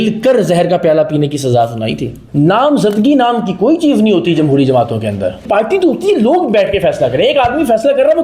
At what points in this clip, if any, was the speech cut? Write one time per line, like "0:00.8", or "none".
0:02.2
0:05.5